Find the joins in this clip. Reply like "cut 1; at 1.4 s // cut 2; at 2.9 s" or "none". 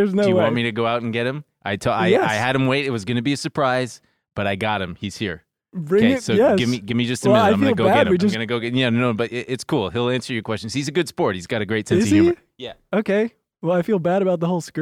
cut 1; at 8.4 s